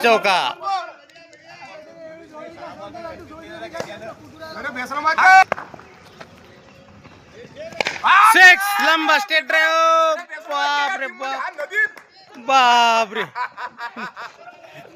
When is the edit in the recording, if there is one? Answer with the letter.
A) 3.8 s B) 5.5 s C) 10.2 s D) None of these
B